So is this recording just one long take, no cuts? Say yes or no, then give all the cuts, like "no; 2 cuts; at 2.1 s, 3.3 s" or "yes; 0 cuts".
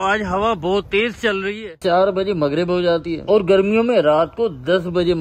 no; 1 cut; at 1.8 s